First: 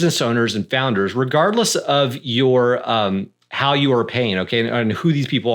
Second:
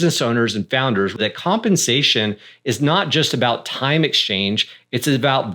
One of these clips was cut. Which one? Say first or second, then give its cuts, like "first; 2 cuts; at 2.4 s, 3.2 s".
second; 1 cut; at 1.2 s